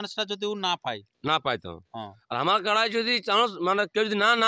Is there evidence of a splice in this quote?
no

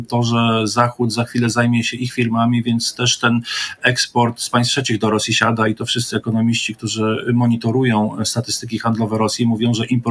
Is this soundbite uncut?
yes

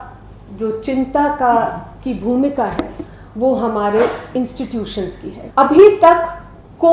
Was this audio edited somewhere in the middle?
yes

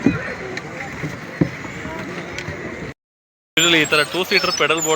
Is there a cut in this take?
yes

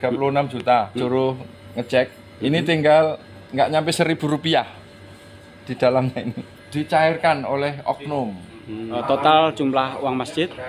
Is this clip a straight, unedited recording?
no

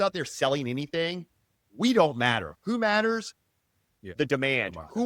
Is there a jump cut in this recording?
no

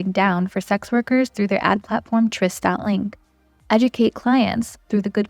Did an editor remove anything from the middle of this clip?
no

